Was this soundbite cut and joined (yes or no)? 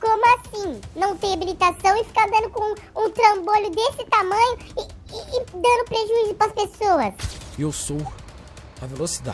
yes